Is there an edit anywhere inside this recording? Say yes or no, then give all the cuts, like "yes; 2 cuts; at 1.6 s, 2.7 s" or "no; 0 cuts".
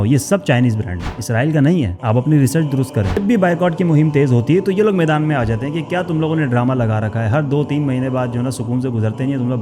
yes; 1 cut; at 3.2 s